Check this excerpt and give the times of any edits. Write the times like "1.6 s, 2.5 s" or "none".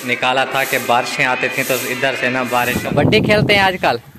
2.8 s